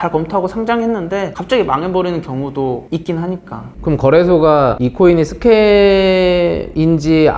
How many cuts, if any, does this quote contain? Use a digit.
0